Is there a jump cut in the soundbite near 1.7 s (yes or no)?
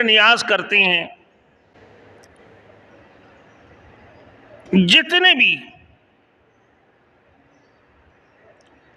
no